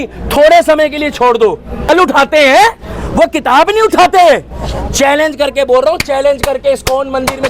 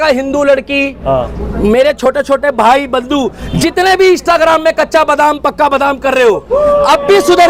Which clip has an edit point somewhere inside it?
first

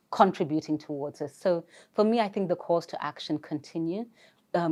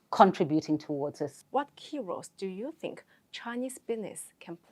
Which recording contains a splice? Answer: second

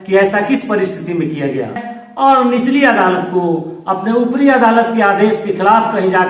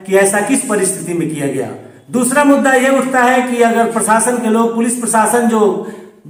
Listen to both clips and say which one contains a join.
first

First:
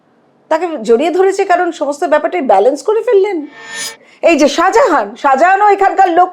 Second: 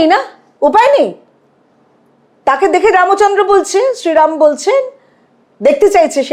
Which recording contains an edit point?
first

